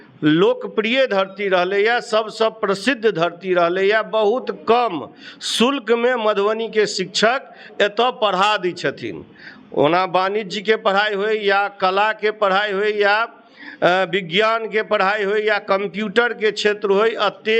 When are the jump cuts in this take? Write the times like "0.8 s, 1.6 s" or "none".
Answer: none